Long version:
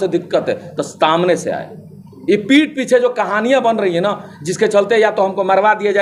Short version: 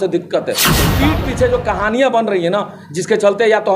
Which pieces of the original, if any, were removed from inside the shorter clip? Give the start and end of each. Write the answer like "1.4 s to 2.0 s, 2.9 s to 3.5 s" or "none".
0.9 s to 2.4 s